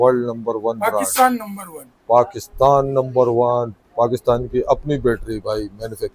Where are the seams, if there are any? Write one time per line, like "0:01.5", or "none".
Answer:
none